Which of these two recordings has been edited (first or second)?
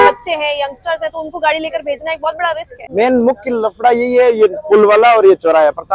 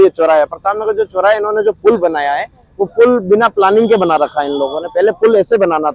first